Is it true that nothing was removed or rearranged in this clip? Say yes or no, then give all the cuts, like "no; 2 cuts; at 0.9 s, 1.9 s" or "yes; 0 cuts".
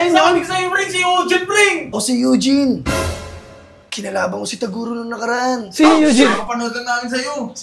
no; 1 cut; at 1.9 s